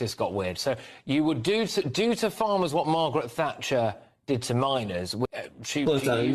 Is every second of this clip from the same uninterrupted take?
no; 1 cut; at 5.2 s

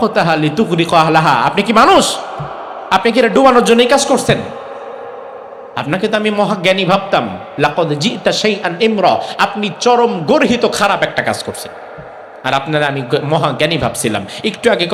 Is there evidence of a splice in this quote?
no; 0 cuts

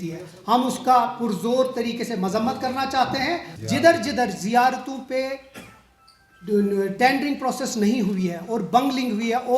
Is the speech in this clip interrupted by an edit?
yes; 1 cut; at 3.5 s

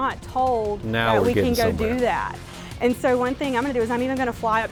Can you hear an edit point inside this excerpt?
no; 0 cuts

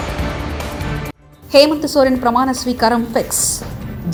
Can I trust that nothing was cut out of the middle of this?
yes; 0 cuts

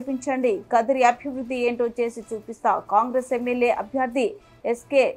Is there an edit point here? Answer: no; 0 cuts

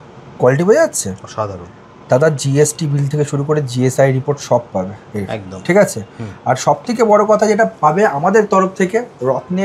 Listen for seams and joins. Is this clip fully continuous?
yes; 0 cuts

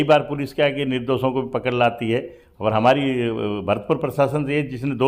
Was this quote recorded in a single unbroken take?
yes; 0 cuts

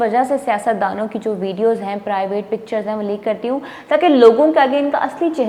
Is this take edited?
no; 0 cuts

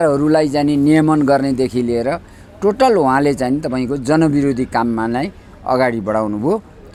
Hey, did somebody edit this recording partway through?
no; 0 cuts

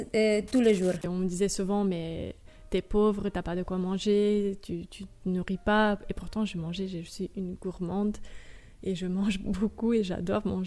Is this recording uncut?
no; 1 cut; at 1.1 s

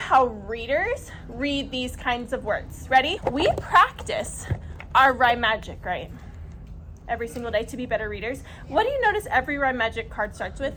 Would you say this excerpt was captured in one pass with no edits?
yes; 0 cuts

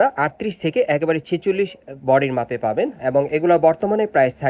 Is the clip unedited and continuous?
yes; 0 cuts

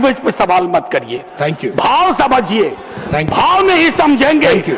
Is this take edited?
no; 0 cuts

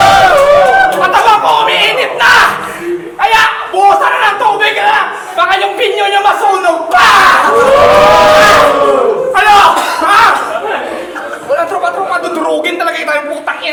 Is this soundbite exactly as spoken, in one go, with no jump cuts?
yes; 0 cuts

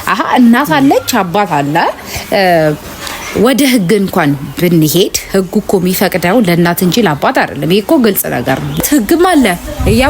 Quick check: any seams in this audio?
yes; 1 cut; at 8.8 s

